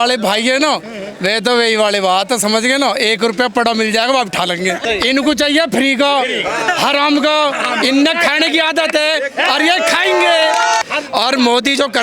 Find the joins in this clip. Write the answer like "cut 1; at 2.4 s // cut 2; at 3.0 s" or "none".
cut 1; at 4.8 s // cut 2; at 10.8 s